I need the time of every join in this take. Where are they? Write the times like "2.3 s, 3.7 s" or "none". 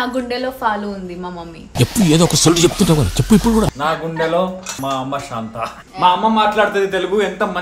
1.6 s, 3.7 s, 4.7 s, 5.8 s